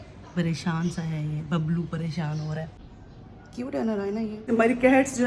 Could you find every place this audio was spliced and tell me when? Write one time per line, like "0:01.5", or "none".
0:02.7
0:04.4